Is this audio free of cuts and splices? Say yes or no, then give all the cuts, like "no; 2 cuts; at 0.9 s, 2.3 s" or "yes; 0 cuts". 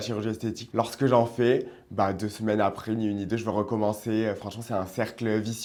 yes; 0 cuts